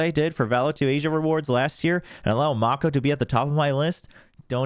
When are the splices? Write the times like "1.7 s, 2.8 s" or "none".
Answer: none